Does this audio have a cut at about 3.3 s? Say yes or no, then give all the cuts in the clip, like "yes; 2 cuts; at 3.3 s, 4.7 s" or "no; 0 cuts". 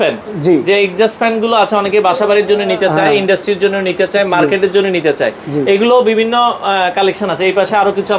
no; 0 cuts